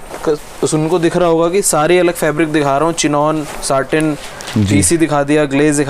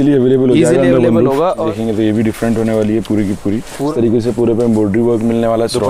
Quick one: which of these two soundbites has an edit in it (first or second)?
second